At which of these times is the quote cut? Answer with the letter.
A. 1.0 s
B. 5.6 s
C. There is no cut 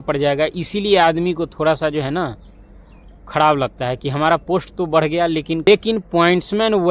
B